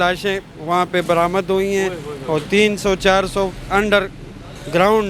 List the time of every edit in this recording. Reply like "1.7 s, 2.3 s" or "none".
none